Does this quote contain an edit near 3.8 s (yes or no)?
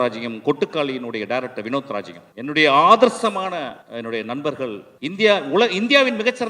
yes